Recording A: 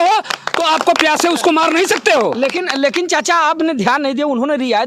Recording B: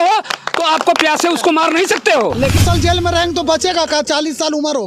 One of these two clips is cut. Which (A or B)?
B